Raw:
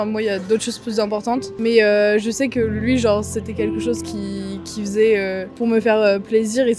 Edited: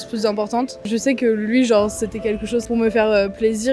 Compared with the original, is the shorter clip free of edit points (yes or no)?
no